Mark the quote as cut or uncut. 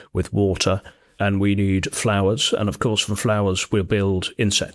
cut